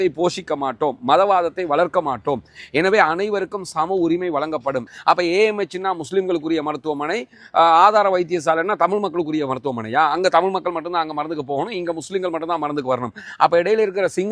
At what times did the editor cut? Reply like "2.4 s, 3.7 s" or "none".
4.9 s